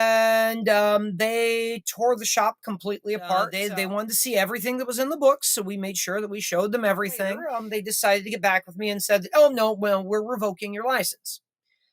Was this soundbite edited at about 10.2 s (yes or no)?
no